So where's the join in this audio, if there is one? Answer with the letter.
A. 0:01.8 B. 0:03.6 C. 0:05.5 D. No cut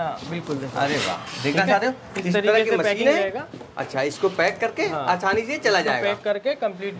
D